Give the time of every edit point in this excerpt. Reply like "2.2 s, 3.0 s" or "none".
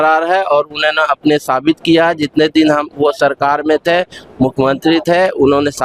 none